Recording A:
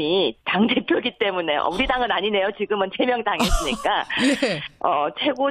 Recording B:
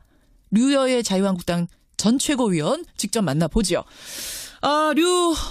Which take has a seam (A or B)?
B